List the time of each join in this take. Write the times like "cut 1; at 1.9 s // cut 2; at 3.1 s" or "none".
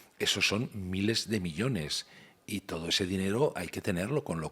none